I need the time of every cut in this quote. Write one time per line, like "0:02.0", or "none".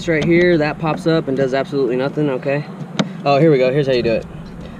none